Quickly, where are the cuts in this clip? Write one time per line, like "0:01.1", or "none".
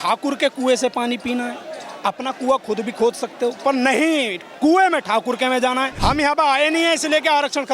0:05.9